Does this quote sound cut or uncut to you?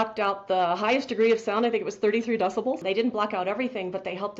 cut